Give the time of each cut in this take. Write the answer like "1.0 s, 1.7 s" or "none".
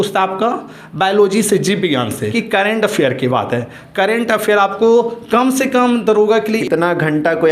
2.4 s, 6.6 s